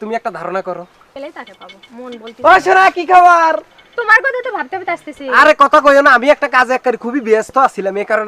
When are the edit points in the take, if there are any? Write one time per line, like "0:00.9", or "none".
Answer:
0:01.1